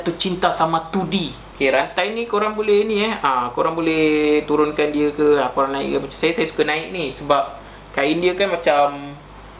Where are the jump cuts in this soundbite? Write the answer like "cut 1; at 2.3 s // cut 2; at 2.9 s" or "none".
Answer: cut 1; at 1.4 s